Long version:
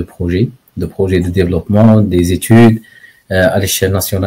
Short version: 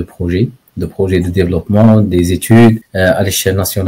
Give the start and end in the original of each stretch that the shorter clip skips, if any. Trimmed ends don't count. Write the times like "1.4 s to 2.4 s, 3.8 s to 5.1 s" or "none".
2.9 s to 3.2 s